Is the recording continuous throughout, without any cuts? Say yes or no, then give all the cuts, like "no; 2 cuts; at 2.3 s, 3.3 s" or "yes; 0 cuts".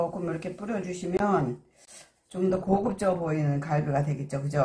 yes; 0 cuts